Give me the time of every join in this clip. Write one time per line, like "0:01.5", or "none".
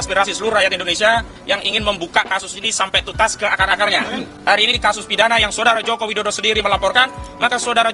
0:04.3